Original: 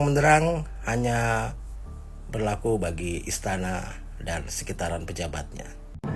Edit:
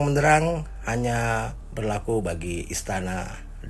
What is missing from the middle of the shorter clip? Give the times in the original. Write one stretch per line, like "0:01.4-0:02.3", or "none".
0:01.6-0:02.2